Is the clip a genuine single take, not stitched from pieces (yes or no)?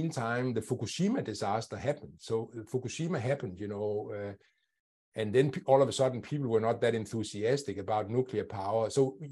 yes